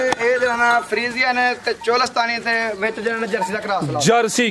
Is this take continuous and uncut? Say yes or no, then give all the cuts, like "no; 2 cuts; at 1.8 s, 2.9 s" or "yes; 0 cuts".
yes; 0 cuts